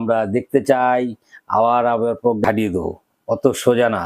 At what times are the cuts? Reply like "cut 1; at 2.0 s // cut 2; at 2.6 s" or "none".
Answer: cut 1; at 2.4 s